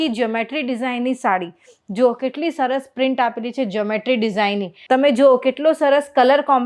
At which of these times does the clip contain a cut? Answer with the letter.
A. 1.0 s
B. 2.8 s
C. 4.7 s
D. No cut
C